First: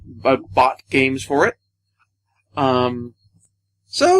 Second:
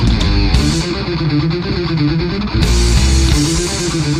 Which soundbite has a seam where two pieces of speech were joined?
first; 1 cut; at 2.4 s

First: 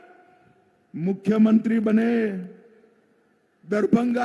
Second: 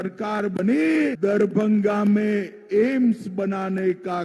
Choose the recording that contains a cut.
second; 1 cut; at 1.2 s

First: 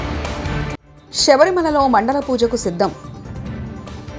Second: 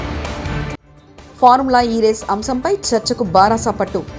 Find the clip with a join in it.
first; 1 cut; at 0.9 s

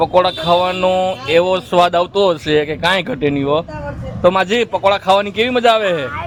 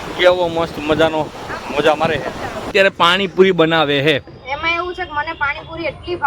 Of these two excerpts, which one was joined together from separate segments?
second; 1 cut; at 2.7 s

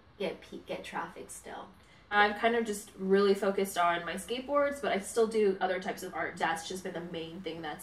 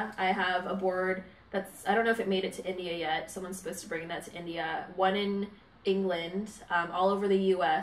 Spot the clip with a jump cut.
first; 2 cuts; at 2.1 s, 6.3 s

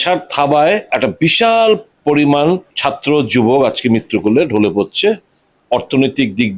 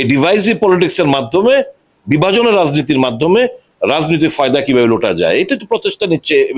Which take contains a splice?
first; 3 cuts; at 0.9 s, 1.9 s, 2.7 s

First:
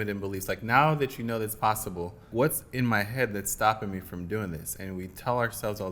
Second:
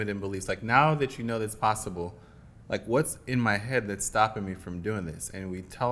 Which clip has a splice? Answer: first; 1 cut; at 2.3 s

